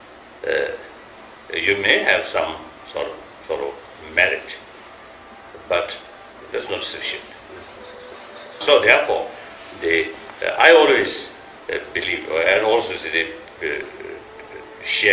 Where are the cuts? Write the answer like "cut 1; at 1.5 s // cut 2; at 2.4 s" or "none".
cut 1; at 13.4 s

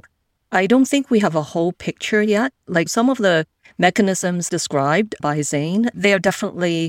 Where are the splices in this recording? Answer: cut 1; at 2.9 s

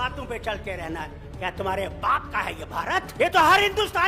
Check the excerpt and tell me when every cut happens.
cut 1; at 3.1 s

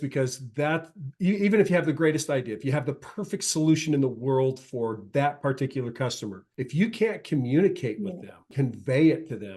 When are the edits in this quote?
cut 1; at 6.4 s // cut 2; at 8.5 s

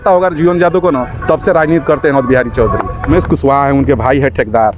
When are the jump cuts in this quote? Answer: cut 1; at 3.1 s

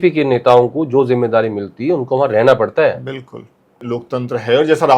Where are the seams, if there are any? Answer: cut 1; at 3.8 s

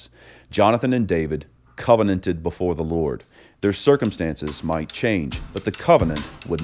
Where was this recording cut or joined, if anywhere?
cut 1; at 5.4 s

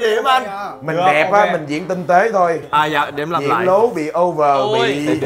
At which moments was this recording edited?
none

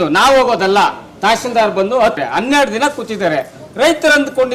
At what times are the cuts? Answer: cut 1; at 2.2 s

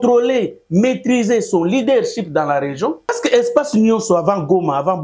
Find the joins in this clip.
cut 1; at 3.2 s

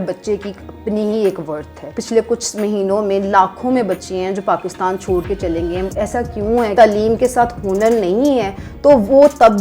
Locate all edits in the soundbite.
cut 1; at 1.9 s // cut 2; at 6.7 s

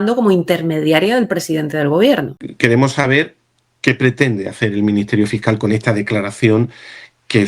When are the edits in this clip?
cut 1; at 2.4 s

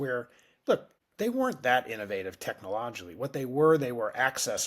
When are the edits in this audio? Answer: cut 1; at 1.0 s

